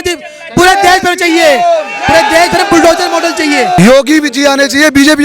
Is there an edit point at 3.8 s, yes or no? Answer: yes